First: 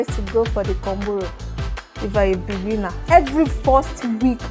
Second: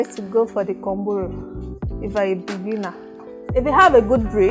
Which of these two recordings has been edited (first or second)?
first